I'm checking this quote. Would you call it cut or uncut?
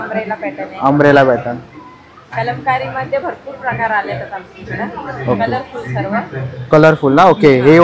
uncut